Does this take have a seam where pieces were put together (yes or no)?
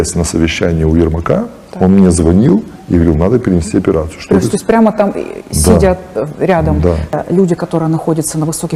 yes